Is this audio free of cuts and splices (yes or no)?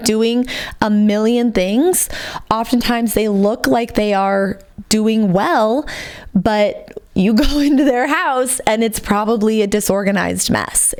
yes